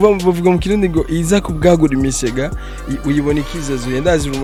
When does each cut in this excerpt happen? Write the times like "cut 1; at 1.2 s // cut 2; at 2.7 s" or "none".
none

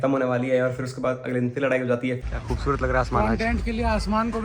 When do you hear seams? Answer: cut 1; at 2.2 s

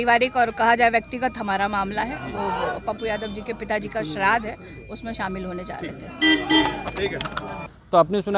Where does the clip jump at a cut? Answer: none

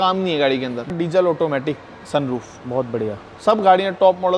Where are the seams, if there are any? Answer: cut 1; at 0.9 s

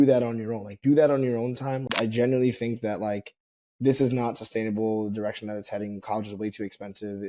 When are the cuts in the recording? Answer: cut 1; at 1.9 s

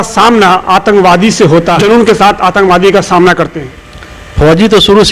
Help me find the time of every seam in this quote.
cut 1; at 1.8 s

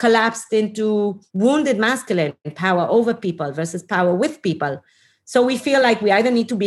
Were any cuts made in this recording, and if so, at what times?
cut 1; at 1.2 s // cut 2; at 2.5 s

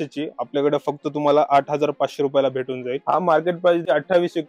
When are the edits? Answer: cut 1; at 3.0 s

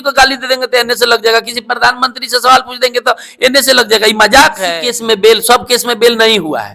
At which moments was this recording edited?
cut 1; at 4.6 s

